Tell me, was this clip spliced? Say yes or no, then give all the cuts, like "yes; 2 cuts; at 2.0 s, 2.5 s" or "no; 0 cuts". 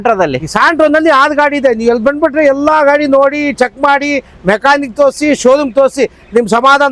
no; 0 cuts